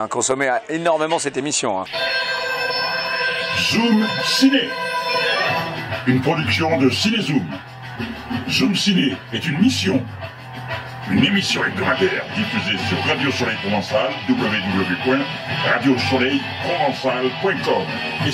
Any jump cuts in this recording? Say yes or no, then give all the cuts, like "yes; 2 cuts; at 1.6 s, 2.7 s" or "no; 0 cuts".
yes; 1 cut; at 1.9 s